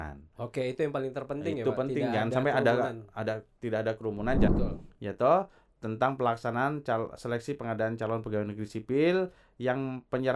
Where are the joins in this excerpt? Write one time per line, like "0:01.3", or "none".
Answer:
0:04.5